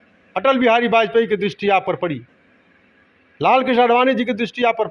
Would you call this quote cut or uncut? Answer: uncut